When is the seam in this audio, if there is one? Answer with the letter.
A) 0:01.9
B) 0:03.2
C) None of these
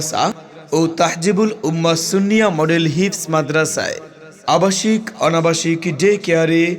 B